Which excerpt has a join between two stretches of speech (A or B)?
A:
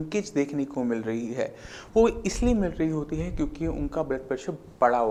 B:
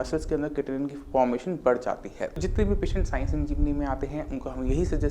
B